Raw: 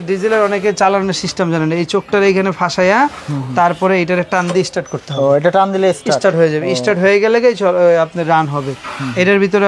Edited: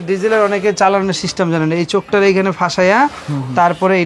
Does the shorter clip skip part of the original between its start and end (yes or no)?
no